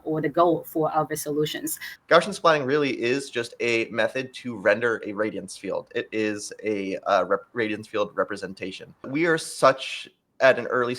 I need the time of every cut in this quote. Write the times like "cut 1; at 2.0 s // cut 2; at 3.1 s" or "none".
cut 1; at 1.8 s // cut 2; at 9.1 s